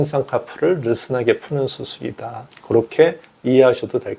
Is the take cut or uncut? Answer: uncut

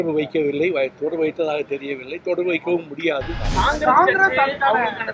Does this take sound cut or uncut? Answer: cut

